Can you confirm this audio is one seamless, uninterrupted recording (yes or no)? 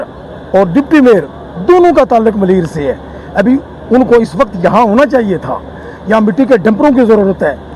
yes